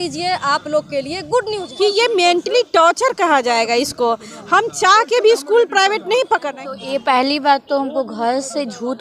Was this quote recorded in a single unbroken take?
no; 2 cuts; at 1.6 s, 6.5 s

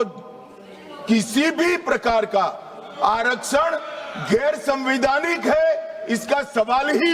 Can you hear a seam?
no; 0 cuts

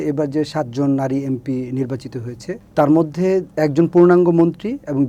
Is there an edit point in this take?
no; 0 cuts

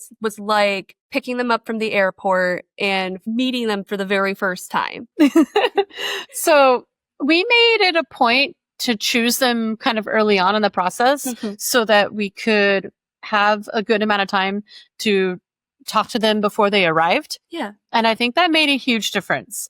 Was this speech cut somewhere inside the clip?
yes; 2 cuts; at 0.9 s, 5.0 s

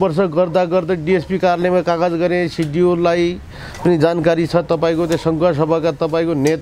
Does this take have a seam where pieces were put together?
no; 0 cuts

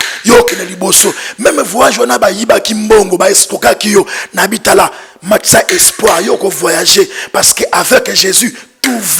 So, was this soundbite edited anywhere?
no; 0 cuts

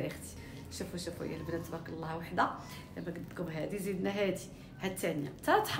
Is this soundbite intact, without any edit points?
yes; 0 cuts

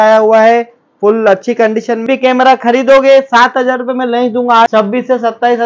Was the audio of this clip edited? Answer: yes; 2 cuts; at 2.1 s, 4.7 s

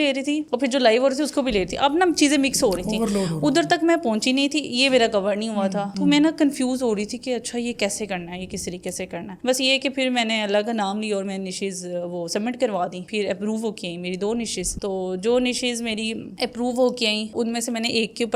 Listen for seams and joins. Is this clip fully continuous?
yes; 0 cuts

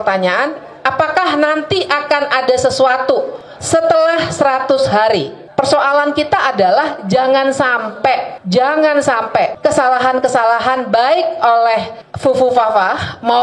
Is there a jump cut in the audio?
yes; 2 cuts; at 5.5 s, 9.5 s

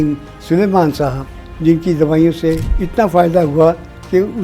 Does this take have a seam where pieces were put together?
yes; 1 cut; at 2.7 s

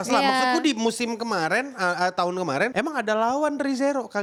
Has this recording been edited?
no; 0 cuts

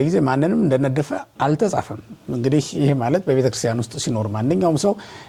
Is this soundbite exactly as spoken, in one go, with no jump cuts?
yes; 0 cuts

